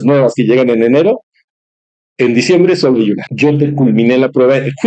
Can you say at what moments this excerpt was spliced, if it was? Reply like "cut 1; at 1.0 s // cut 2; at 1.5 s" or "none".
cut 1; at 3.3 s

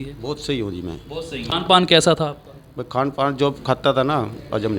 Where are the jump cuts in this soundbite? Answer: cut 1; at 1.5 s

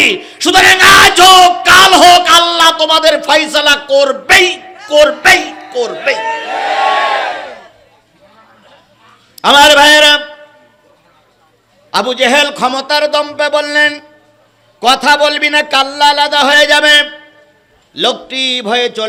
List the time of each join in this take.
none

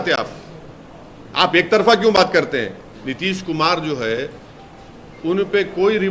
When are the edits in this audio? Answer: cut 1; at 2.9 s

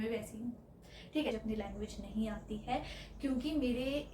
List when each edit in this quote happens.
cut 1; at 1.3 s

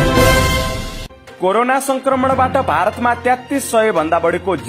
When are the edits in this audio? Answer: cut 1; at 0.9 s

